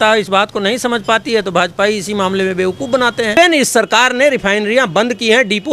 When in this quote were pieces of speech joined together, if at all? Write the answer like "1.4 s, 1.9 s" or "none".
3.3 s